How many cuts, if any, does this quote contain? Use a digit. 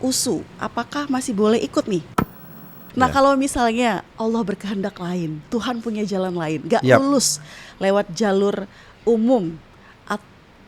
1